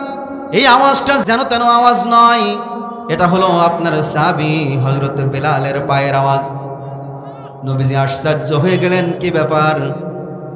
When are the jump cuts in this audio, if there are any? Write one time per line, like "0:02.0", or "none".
0:01.2